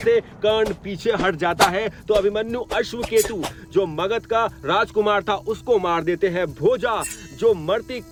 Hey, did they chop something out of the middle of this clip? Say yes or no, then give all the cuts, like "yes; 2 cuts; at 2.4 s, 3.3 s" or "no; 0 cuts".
no; 0 cuts